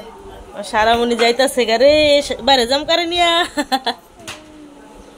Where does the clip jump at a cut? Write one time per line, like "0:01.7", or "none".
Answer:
none

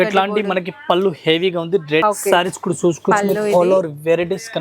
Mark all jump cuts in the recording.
0:02.0

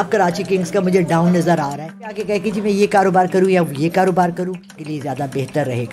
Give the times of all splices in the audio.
0:02.2
0:04.8

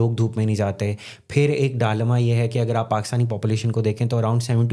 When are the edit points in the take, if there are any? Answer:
none

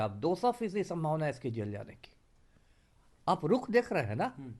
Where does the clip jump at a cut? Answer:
none

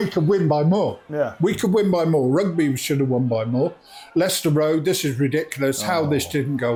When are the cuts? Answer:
none

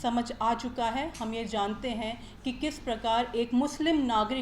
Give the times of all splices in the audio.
none

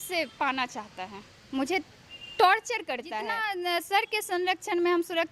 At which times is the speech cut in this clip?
0:03.4

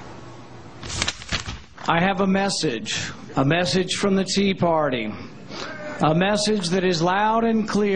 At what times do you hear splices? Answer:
none

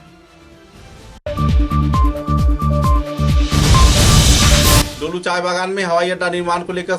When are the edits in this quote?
0:04.8

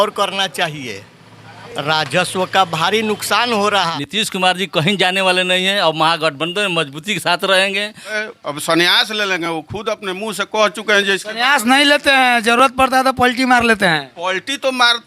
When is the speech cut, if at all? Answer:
0:03.8
0:08.2

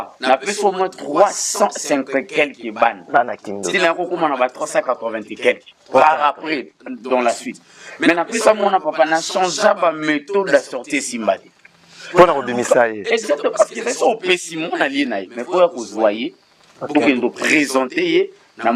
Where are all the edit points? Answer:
none

